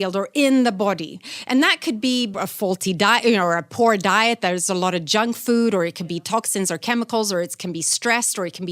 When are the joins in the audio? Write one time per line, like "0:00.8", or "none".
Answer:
0:02.3

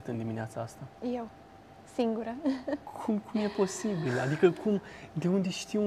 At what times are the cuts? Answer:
none

